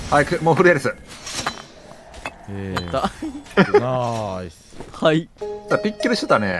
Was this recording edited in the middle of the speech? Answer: no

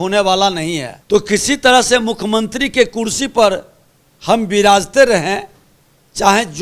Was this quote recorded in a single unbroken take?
no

